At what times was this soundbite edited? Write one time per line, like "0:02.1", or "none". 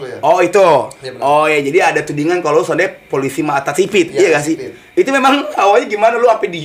none

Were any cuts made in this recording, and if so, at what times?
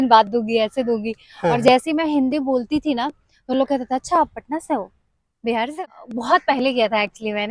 0:05.7

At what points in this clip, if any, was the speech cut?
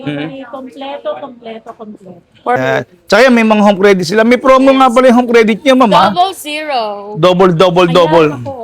0:02.6

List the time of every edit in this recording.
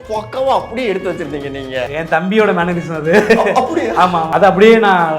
0:01.9
0:04.3

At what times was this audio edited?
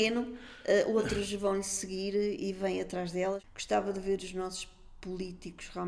0:03.4

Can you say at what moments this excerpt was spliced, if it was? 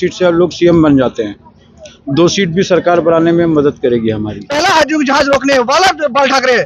0:04.4

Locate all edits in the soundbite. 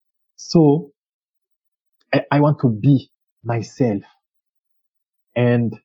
none

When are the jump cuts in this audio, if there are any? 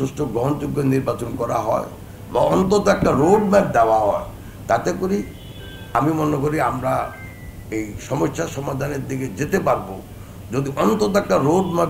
none

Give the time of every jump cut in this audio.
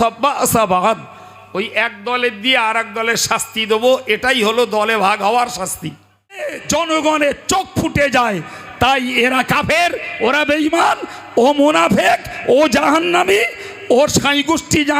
0:06.6

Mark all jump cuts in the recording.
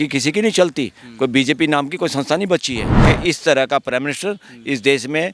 0:02.9

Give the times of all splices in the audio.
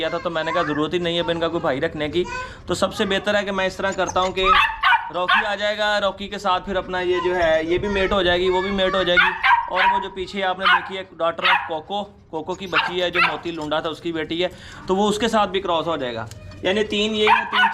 none

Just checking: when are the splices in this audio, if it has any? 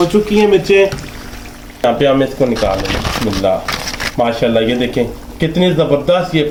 none

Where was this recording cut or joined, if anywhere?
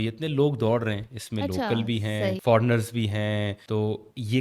0:02.4
0:03.6

